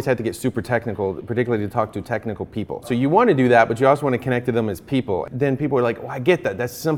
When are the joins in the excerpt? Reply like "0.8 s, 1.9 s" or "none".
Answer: 2.9 s, 5.3 s